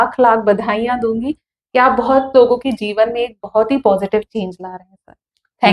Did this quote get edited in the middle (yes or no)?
no